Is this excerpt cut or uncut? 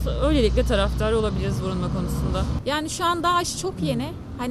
cut